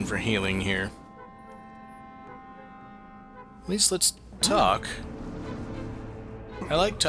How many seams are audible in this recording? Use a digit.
0